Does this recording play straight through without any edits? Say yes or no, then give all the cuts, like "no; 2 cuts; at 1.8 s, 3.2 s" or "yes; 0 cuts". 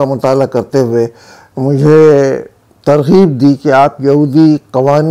yes; 0 cuts